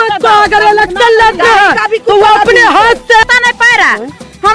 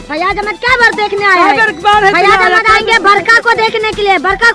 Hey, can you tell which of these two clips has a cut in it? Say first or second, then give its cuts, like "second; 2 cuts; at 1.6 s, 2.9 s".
first; 1 cut; at 3.2 s